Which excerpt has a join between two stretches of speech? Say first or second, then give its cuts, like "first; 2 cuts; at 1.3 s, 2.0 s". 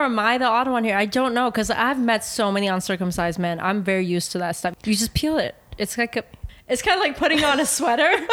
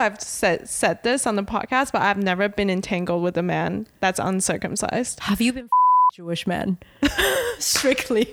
first; 2 cuts; at 4.7 s, 6.4 s